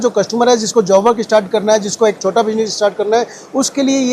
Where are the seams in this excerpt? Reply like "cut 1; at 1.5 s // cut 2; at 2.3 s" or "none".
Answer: none